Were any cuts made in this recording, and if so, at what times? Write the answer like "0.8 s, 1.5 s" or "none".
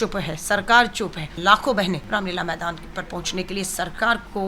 1.3 s, 2.0 s